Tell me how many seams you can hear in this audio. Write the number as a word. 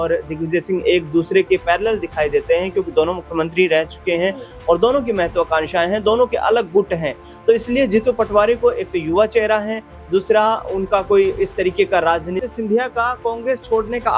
one